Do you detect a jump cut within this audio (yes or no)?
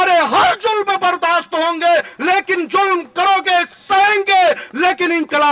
no